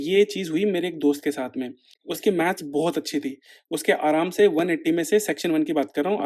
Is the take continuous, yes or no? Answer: yes